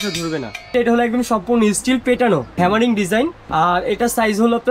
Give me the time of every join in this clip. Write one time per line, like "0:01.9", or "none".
0:00.7
0:02.5
0:03.4